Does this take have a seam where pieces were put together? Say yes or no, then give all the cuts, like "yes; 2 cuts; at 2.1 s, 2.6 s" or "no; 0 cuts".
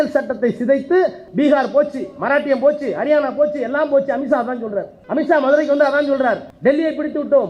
yes; 3 cuts; at 1.2 s, 4.9 s, 6.5 s